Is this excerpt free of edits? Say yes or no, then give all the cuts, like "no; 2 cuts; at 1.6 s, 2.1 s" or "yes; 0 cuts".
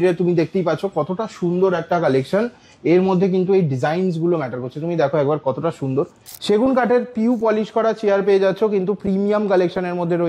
no; 1 cut; at 6.2 s